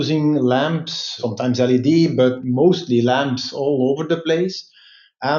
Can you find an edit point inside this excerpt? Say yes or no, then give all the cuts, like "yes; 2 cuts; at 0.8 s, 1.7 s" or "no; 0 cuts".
no; 0 cuts